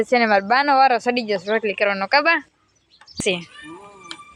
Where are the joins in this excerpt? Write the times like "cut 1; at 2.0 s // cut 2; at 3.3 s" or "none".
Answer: cut 1; at 3.2 s